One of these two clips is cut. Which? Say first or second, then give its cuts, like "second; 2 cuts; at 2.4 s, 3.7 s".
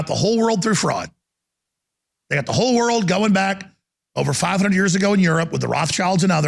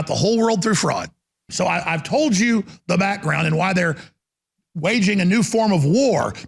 second; 1 cut; at 1.4 s